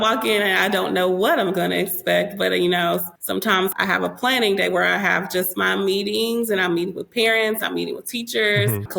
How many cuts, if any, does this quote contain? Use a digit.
0